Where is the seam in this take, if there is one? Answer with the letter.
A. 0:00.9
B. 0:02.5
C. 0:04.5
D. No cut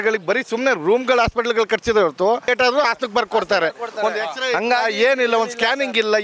D